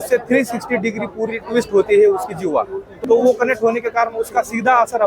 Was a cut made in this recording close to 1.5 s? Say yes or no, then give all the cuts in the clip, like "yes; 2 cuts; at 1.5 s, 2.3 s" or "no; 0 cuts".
no; 1 cut; at 2.8 s